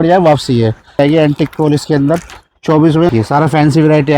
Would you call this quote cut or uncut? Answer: cut